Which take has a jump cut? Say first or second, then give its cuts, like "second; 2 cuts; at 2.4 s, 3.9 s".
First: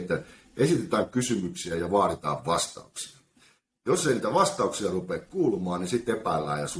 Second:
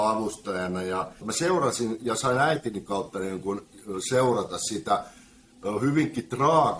second; 1 cut; at 1.3 s